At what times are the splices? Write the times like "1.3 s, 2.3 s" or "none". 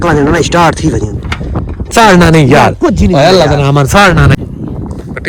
1.9 s, 4.4 s

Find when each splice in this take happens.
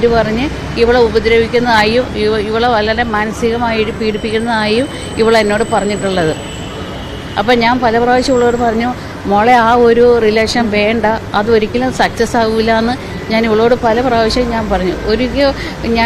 1.4 s

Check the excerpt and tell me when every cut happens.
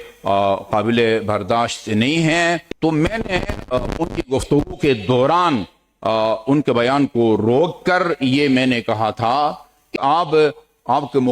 2.7 s, 9.9 s

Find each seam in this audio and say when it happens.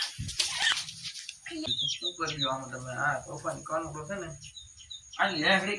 1.7 s

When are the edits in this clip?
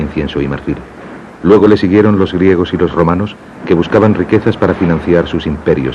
3.0 s

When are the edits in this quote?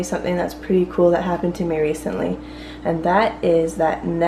none

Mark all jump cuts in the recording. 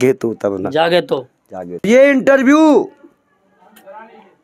1.8 s

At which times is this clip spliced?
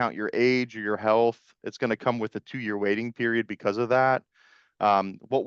none

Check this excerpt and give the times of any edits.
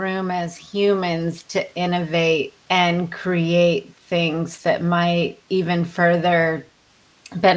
2.6 s, 5.4 s

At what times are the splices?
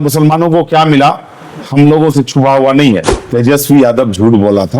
3.2 s

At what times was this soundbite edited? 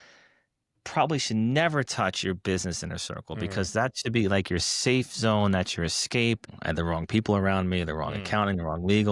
6.6 s

